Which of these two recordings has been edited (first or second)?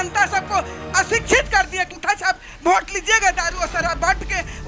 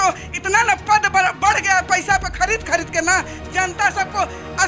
first